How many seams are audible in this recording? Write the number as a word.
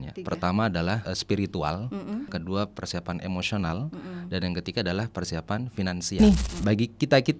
three